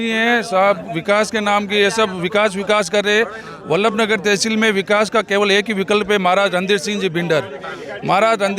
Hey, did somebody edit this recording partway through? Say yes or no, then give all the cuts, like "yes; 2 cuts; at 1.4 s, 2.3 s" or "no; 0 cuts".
no; 0 cuts